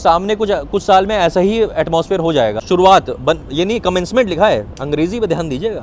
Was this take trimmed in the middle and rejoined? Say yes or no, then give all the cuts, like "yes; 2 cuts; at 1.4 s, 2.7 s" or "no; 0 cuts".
yes; 1 cut; at 2.6 s